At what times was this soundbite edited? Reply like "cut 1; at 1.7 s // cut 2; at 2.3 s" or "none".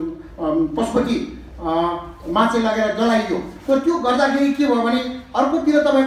none